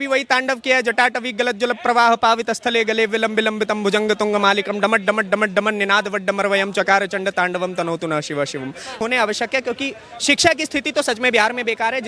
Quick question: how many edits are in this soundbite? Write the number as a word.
one